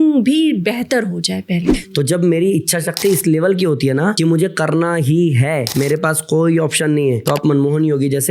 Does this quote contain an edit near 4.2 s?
yes; 4 cuts; at 1.7 s, 4.2 s, 5.7 s, 7.2 s

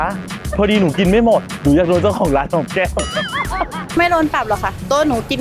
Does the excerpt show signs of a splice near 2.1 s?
no; 1 cut; at 4.0 s

